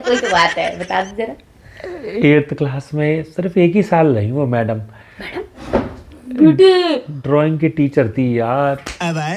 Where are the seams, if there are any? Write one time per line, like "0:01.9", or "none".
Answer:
none

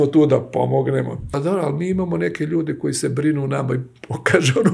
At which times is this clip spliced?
0:01.3

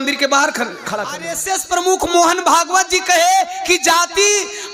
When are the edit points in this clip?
0:01.3

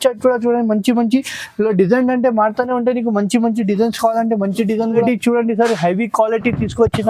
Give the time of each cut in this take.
0:05.0

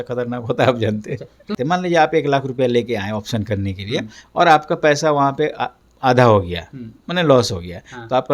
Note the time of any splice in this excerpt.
0:01.5

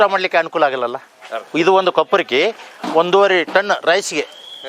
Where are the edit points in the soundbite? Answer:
0:01.4

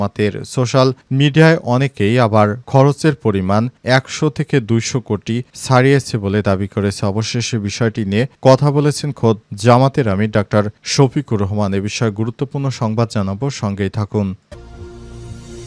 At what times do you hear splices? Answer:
0:14.5

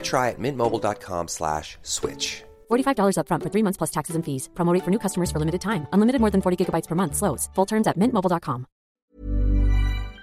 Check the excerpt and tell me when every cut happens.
0:08.9

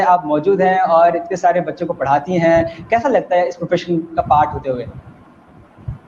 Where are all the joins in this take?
none

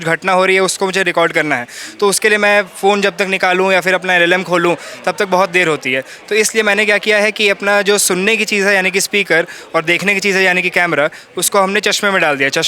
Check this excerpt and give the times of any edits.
none

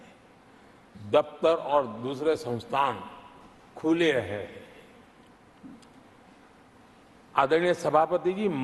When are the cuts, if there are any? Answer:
none

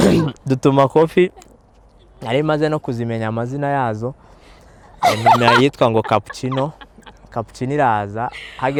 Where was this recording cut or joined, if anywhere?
none

